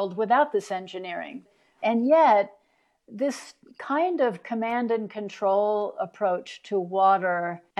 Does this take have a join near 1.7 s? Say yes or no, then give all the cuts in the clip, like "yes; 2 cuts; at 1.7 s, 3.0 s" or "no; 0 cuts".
yes; 1 cut; at 1.7 s